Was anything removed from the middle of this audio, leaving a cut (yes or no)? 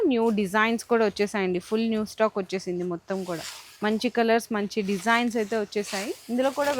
no